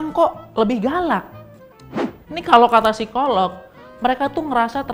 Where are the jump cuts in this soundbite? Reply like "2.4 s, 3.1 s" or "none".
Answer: none